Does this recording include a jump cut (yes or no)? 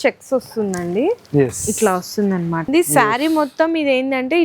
yes